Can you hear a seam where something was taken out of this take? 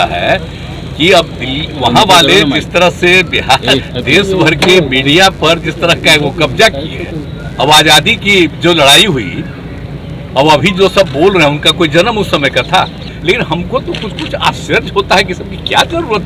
yes; 2 cuts; at 7.2 s, 13.1 s

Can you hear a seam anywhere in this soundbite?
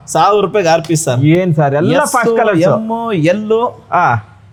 no; 0 cuts

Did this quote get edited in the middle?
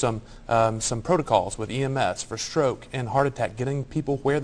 no; 0 cuts

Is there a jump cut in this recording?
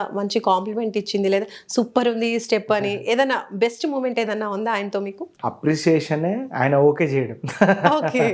yes; 1 cut; at 5.2 s

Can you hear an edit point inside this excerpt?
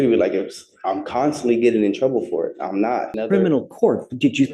yes; 1 cut; at 3.1 s

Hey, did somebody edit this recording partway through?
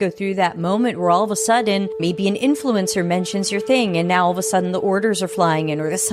no; 0 cuts

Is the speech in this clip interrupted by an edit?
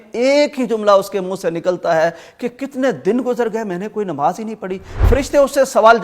yes; 1 cut; at 5.1 s

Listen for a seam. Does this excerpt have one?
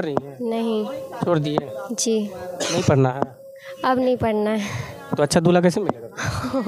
no; 0 cuts

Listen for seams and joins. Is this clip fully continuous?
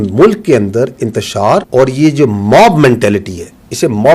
no; 1 cut; at 1.7 s

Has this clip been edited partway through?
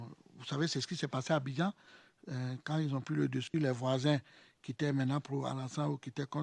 no; 0 cuts

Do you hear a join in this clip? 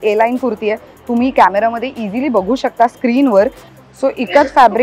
yes; 1 cut; at 3.7 s

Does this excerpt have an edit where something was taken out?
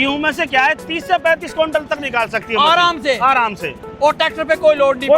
no; 0 cuts

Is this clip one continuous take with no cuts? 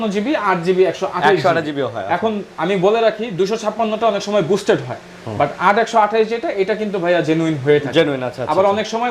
yes; 0 cuts

